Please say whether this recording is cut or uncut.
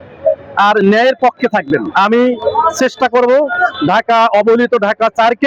cut